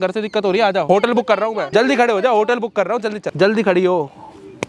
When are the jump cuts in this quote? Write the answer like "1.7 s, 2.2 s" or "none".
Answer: 0.8 s, 1.7 s, 3.3 s